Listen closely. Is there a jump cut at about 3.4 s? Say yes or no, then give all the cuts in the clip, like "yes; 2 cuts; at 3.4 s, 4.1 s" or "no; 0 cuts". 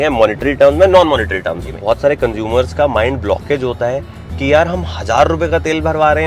no; 1 cut; at 1.7 s